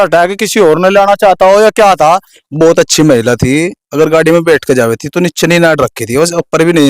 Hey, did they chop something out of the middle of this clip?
yes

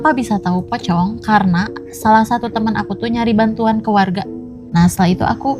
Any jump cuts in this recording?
yes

